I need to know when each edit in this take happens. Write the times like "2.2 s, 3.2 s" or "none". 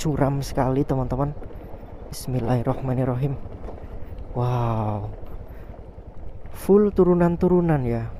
none